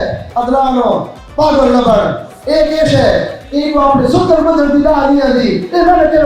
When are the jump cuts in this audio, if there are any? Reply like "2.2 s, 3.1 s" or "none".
none